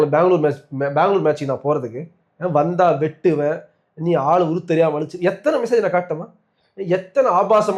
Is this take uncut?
yes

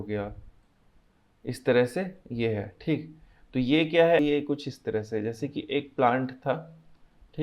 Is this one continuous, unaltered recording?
no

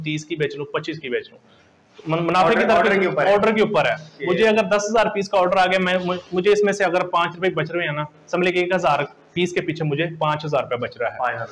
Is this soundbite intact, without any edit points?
yes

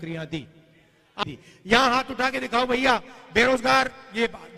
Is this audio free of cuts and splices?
no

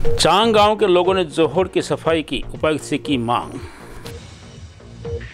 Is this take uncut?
no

